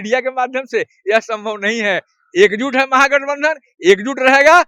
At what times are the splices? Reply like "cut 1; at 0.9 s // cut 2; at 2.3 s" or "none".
none